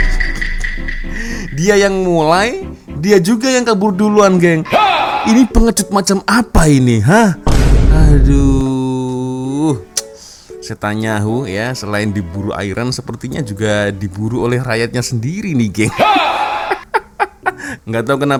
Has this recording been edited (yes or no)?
no